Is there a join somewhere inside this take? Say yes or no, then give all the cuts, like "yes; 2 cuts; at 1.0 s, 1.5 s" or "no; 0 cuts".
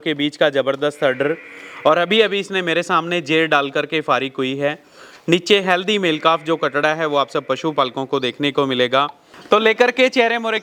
no; 0 cuts